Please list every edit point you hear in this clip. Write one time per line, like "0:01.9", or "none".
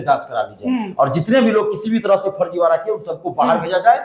none